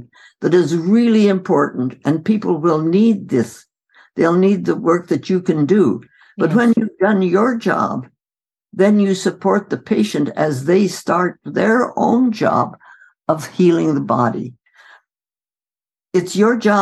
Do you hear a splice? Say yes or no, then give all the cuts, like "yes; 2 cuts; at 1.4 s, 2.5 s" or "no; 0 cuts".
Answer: no; 0 cuts